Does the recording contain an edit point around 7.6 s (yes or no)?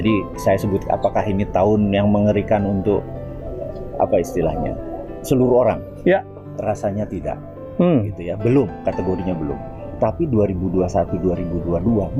no